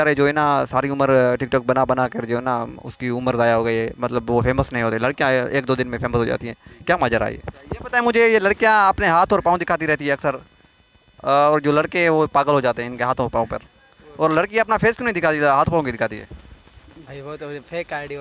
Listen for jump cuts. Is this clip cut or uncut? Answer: uncut